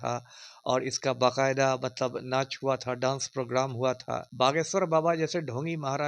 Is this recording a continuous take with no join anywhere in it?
no; 1 cut; at 4.3 s

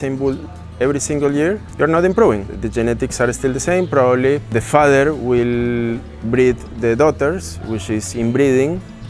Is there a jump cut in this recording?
yes; 3 cuts; at 1.7 s, 2.5 s, 4.5 s

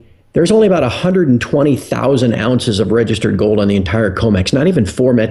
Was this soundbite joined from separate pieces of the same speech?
no; 0 cuts

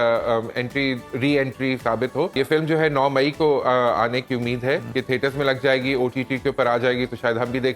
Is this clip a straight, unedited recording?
no; 2 cuts; at 2.4 s, 4.9 s

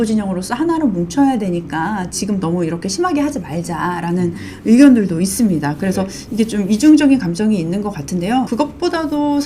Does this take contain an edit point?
yes; 1 cut; at 8.5 s

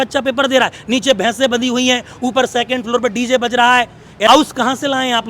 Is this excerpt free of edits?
no; 1 cut; at 4.3 s

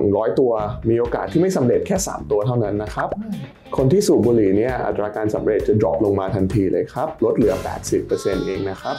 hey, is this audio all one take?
yes; 0 cuts

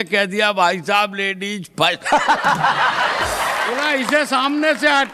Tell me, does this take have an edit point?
yes; 1 cut; at 3.8 s

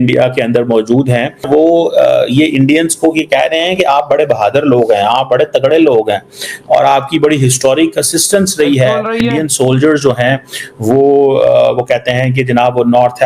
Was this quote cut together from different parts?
yes; 2 cuts; at 1.4 s, 9.2 s

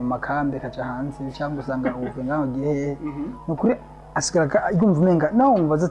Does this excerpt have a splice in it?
no; 0 cuts

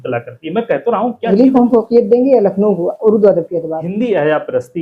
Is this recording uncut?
no; 2 cuts; at 1.2 s, 3.8 s

